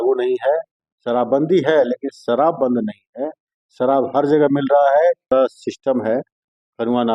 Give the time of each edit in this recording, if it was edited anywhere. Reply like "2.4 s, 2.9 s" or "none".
5.3 s